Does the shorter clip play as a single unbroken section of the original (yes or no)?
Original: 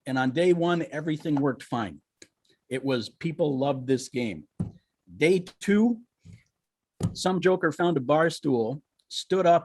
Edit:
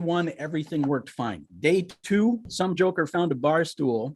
no